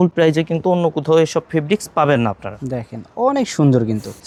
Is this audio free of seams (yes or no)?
yes